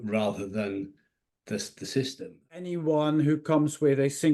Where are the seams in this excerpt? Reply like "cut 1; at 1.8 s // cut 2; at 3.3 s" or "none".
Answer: cut 1; at 2.7 s